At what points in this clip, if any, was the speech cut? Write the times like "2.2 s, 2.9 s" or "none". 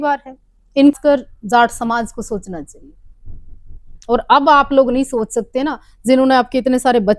0.9 s